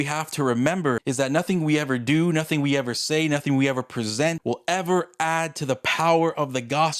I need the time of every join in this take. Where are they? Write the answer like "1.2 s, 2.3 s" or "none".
1.0 s, 4.4 s